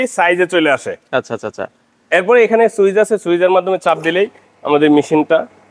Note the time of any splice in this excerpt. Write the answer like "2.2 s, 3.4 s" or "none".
none